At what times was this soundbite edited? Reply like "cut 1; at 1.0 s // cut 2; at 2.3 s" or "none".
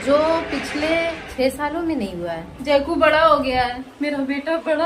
cut 1; at 1.2 s // cut 2; at 2.5 s